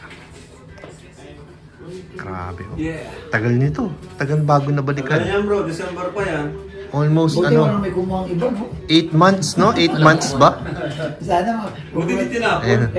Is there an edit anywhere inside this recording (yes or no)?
no